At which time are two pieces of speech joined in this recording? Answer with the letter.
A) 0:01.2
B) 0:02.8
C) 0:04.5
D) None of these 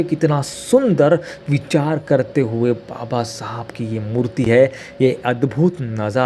D